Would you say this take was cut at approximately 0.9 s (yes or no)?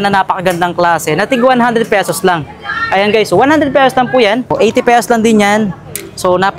no